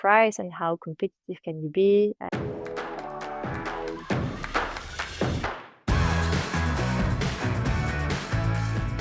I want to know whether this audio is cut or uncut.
cut